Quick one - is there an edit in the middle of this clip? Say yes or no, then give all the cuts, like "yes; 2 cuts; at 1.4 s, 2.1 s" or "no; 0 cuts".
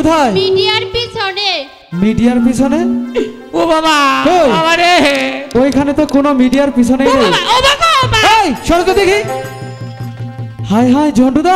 no; 0 cuts